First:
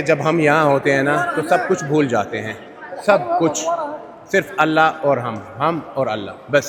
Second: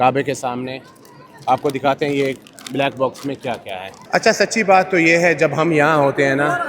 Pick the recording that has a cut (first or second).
second